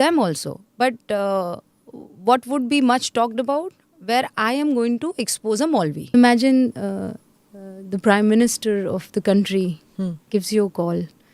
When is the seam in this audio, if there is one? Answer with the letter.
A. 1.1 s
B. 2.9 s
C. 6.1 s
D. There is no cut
C